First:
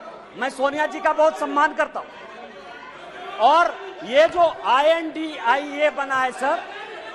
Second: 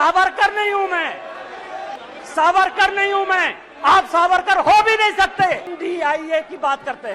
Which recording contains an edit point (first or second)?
second